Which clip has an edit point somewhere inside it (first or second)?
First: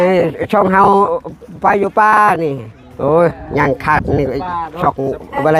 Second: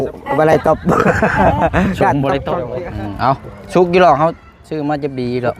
second